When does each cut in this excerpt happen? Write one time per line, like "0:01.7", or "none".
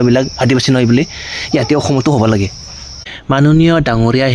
0:02.6